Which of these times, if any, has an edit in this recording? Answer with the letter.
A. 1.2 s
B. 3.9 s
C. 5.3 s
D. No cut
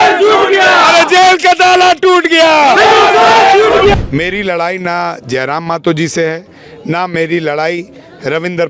B